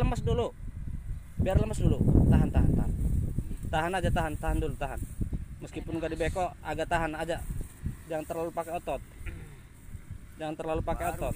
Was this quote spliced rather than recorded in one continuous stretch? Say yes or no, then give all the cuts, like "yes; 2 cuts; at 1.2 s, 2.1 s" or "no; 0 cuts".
no; 0 cuts